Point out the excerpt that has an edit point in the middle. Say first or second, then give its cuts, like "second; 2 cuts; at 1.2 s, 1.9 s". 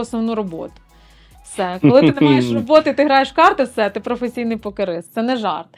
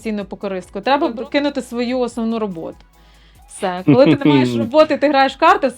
second; 1 cut; at 1.1 s